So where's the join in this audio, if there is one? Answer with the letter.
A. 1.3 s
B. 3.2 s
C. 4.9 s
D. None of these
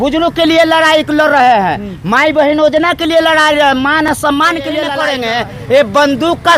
C